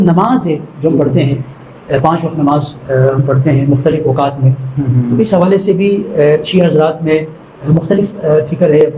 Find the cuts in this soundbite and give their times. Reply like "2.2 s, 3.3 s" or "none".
none